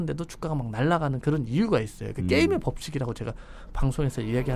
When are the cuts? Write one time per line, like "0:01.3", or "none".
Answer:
none